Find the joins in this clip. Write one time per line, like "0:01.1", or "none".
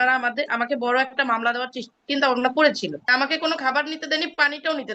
0:03.1